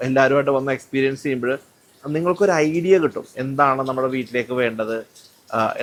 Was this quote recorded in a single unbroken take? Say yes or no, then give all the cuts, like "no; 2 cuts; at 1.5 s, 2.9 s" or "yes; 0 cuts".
yes; 0 cuts